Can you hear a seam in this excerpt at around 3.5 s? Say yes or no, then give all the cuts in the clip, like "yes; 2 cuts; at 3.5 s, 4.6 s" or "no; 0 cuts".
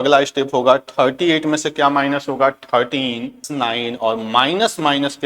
yes; 1 cut; at 3.5 s